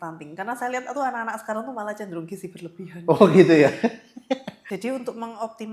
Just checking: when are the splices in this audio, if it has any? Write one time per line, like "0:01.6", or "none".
0:04.6